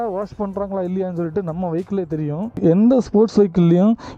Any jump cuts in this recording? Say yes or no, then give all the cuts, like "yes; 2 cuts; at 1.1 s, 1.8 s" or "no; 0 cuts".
yes; 1 cut; at 2.6 s